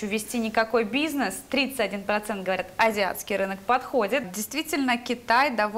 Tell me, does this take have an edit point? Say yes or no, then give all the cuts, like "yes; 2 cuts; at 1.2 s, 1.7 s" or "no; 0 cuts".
yes; 1 cut; at 4.3 s